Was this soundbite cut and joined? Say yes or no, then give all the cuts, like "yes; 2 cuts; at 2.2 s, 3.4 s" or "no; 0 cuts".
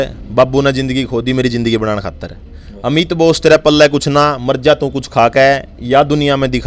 no; 0 cuts